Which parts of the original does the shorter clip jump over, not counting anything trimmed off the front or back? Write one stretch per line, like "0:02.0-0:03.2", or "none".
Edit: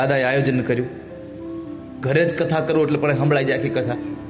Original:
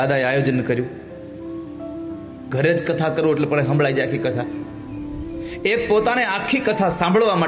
0:01.8-0:02.3